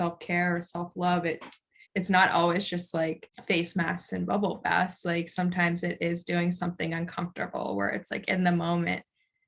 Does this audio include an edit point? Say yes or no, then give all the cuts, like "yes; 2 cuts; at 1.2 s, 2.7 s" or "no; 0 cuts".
yes; 2 cuts; at 1.8 s, 3.3 s